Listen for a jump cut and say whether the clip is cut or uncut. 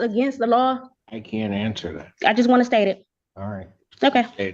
cut